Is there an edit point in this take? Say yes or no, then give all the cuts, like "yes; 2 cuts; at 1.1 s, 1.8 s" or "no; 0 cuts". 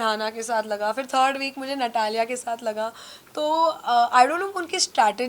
no; 0 cuts